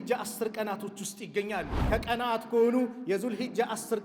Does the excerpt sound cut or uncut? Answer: cut